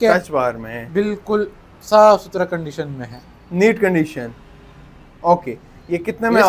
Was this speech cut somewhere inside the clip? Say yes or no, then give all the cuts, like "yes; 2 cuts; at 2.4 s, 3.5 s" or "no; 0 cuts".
no; 0 cuts